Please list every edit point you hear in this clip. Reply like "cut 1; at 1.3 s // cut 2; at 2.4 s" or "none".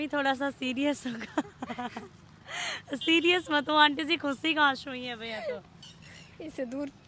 none